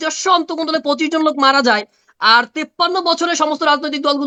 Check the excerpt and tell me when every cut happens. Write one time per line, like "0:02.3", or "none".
none